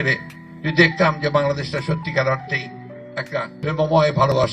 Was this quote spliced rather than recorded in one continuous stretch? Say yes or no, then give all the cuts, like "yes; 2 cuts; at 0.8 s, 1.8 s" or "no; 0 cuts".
yes; 1 cut; at 3.5 s